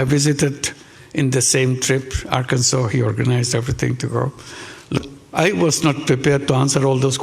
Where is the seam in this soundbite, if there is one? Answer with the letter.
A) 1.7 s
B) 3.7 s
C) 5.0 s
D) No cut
C